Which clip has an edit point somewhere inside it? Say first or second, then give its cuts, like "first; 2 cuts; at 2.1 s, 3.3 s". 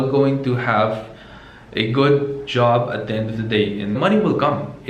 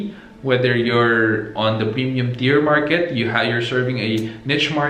first; 1 cut; at 4.0 s